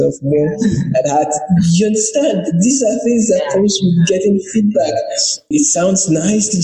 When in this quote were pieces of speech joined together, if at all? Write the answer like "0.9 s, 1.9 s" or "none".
5.5 s